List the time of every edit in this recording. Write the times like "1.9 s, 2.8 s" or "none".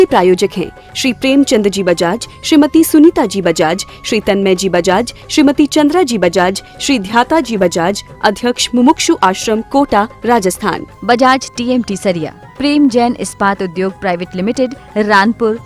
none